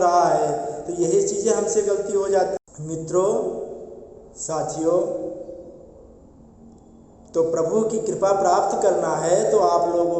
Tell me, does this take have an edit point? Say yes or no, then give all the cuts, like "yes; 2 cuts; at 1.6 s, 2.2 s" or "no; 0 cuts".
yes; 1 cut; at 2.6 s